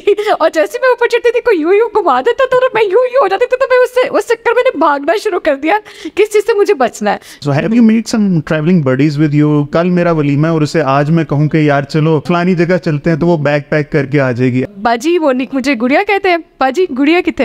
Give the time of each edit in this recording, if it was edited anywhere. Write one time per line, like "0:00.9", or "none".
0:07.4
0:09.7
0:12.2
0:14.6